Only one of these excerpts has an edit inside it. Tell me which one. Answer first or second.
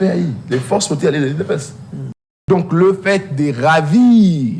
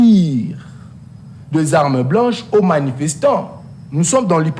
first